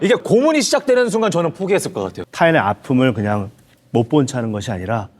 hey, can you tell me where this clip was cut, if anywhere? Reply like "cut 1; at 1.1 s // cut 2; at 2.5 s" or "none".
cut 1; at 2.2 s